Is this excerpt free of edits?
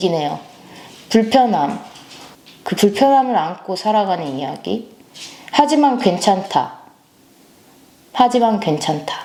yes; 0 cuts

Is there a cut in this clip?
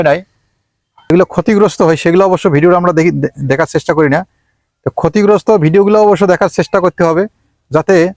yes; 1 cut; at 1.1 s

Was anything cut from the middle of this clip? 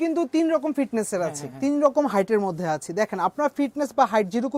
no; 0 cuts

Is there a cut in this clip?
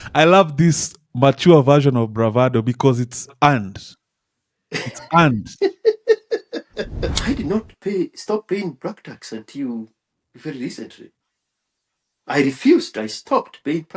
yes; 1 cut; at 7.1 s

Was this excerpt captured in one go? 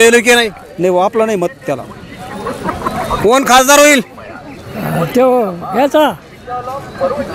yes; 0 cuts

